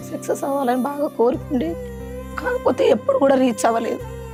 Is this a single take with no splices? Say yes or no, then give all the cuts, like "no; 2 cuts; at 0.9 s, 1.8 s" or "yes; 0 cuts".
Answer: yes; 0 cuts